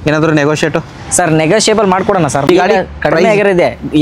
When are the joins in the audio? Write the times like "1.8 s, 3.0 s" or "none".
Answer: 2.5 s